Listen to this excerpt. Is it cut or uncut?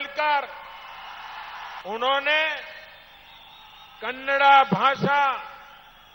cut